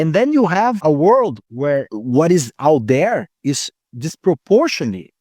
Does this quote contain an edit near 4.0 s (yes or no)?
no